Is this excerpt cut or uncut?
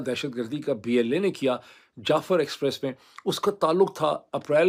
uncut